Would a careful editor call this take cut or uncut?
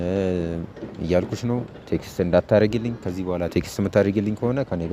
uncut